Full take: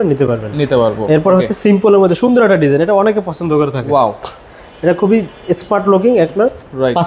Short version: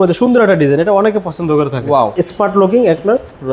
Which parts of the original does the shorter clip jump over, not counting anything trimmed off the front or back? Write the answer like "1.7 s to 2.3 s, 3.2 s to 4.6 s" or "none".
4.1 s to 5.4 s

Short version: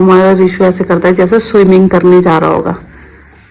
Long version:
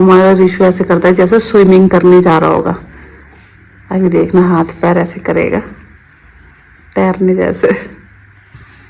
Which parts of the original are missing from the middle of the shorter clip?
none

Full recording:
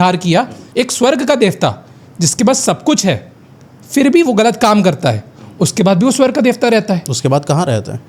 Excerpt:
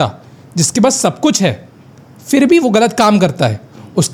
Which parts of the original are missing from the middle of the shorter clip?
none

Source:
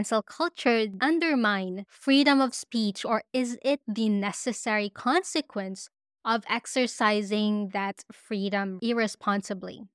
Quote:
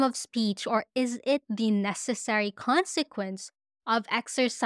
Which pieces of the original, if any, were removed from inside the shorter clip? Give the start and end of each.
none

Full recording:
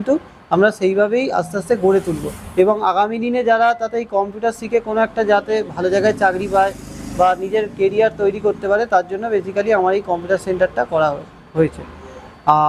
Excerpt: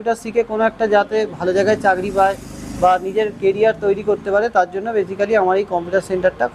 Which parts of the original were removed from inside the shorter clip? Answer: none

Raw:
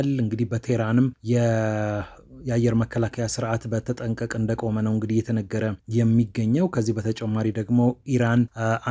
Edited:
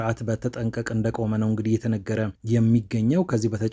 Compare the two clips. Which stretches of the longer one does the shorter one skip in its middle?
none

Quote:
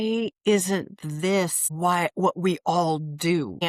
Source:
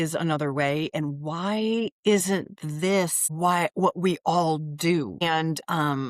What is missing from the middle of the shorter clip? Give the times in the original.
none

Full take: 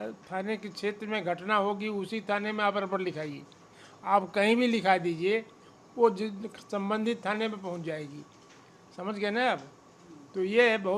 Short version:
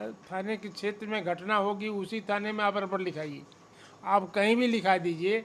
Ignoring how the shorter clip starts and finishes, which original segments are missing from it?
none

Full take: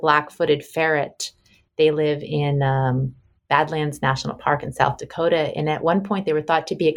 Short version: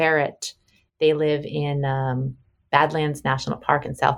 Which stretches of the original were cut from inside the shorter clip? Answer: none

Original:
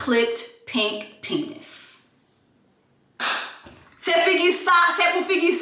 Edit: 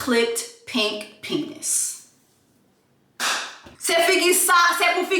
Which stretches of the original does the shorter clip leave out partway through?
3.7 s to 3.9 s

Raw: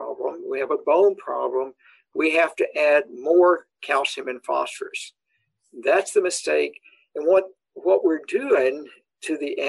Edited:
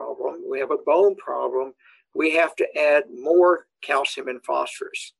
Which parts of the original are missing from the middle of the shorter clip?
none

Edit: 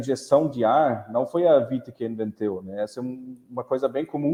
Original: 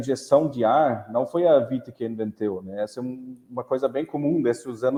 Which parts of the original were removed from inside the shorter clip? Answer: none

